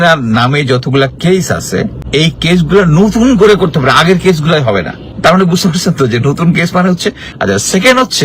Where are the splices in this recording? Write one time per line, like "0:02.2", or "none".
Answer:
0:02.0
0:05.0
0:07.3